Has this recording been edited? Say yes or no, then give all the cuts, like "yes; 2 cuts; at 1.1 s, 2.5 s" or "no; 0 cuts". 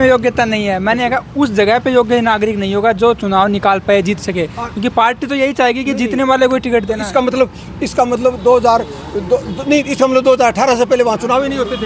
no; 0 cuts